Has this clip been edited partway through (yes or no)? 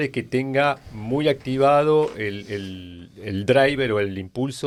no